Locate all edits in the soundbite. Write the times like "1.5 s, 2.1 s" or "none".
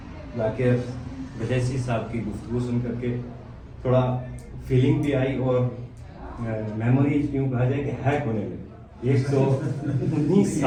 none